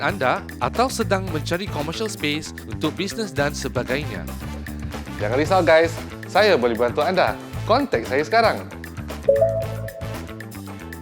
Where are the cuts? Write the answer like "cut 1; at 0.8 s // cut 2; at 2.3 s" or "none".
cut 1; at 9.9 s